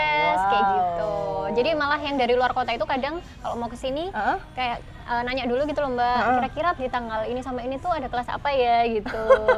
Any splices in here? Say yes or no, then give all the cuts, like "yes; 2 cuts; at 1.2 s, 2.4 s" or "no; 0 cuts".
no; 0 cuts